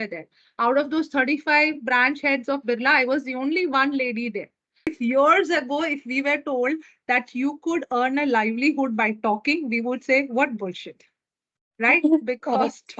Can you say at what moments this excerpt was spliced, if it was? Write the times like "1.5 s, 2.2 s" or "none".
4.9 s